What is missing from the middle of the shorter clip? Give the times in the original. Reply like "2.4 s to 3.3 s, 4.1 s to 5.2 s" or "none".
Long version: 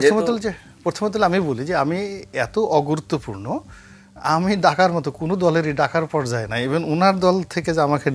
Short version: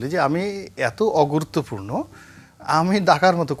none